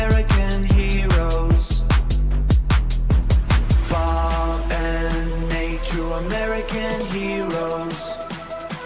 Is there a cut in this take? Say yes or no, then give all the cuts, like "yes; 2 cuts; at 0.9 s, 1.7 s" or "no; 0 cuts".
no; 0 cuts